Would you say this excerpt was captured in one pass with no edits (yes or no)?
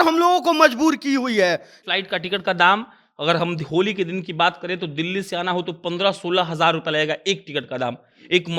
no